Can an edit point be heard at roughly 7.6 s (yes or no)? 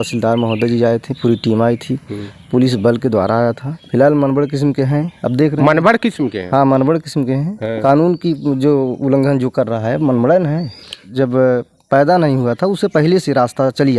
yes